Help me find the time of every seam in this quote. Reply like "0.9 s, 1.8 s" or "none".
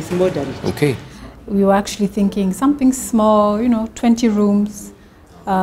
1.0 s